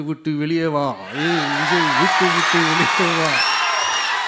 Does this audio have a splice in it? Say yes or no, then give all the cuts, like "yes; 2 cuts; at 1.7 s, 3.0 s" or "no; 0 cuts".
no; 0 cuts